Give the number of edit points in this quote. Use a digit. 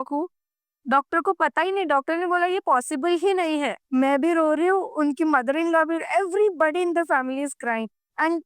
1